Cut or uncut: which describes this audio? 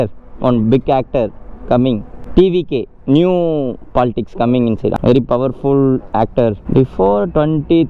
cut